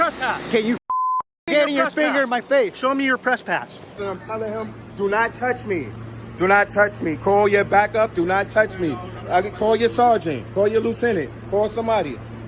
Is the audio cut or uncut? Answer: cut